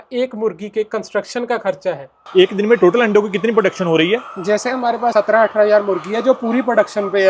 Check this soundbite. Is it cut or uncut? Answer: cut